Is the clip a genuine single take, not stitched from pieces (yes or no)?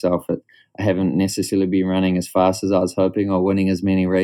yes